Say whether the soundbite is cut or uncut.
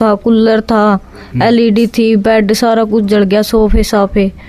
uncut